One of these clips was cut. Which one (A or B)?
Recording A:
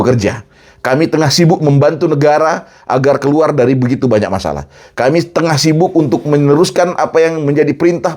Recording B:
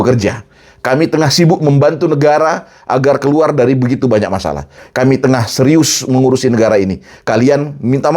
B